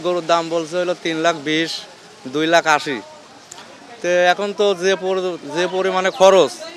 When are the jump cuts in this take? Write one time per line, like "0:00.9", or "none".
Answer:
none